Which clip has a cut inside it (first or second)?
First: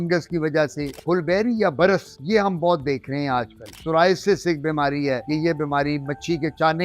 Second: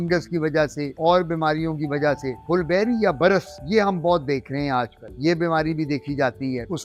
first